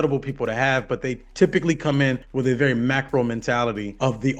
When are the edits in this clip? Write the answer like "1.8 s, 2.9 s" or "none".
none